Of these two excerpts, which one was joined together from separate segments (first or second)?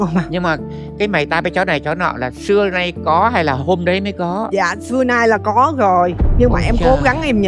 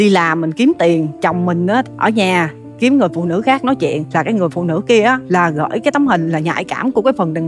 second